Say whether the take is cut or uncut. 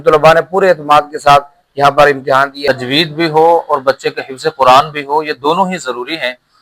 cut